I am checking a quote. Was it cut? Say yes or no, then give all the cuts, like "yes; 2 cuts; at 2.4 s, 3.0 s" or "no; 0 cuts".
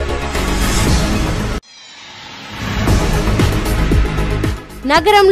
yes; 1 cut; at 3.5 s